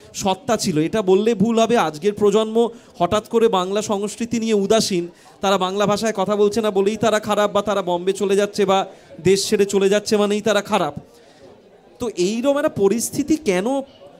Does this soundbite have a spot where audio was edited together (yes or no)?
no